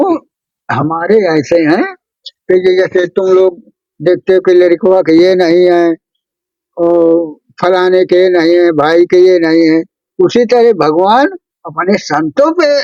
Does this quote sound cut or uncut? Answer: uncut